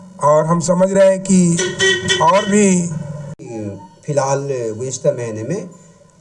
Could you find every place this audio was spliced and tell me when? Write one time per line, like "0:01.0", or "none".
none